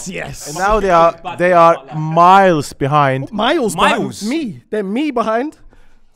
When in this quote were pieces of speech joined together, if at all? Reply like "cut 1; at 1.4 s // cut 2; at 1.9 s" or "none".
none